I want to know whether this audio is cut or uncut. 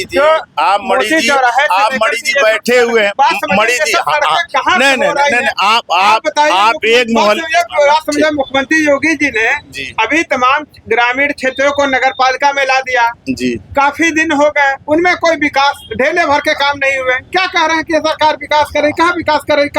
uncut